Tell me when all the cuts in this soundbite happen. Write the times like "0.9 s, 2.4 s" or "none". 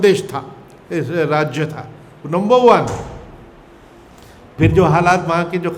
none